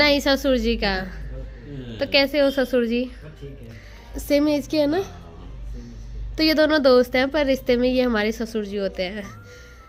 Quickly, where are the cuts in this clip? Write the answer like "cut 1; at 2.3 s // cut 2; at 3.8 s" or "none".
none